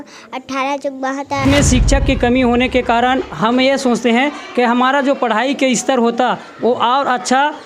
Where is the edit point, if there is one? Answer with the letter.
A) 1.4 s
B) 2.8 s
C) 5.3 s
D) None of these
A